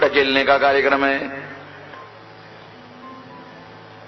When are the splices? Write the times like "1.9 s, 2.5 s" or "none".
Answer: none